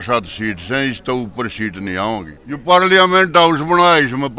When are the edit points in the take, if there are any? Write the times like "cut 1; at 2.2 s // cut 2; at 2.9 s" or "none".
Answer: cut 1; at 2.4 s